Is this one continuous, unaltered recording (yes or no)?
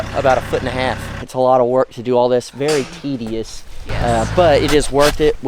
no